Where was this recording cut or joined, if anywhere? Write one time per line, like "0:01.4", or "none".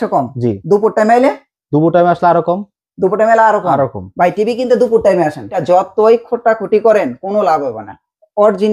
0:05.6